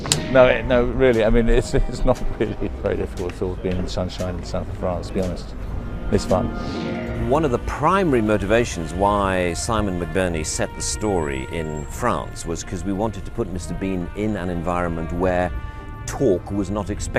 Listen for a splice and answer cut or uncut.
cut